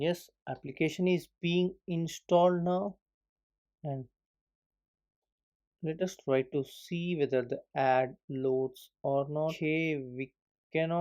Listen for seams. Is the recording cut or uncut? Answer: cut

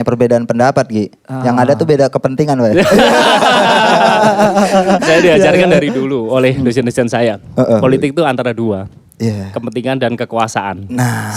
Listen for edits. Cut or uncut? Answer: uncut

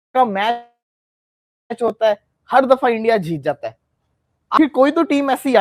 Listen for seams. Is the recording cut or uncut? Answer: uncut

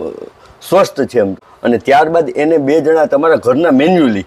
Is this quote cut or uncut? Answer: cut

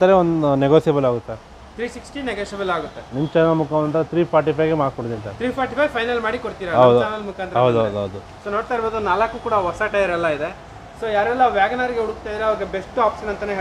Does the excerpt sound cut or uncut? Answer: uncut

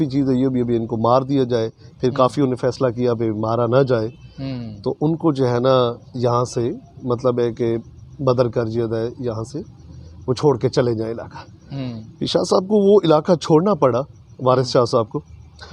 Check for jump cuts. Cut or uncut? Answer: uncut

